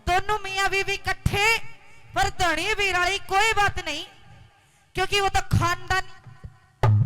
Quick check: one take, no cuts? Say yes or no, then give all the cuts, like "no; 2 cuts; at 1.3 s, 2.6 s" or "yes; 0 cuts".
yes; 0 cuts